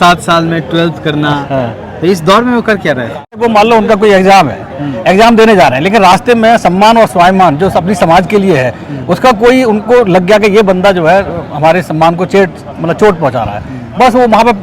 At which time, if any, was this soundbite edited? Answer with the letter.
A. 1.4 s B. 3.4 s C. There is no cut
B